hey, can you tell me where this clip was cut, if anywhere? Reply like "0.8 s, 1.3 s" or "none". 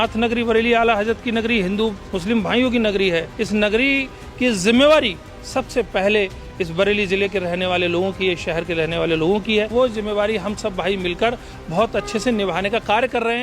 2.1 s, 3.3 s, 9.7 s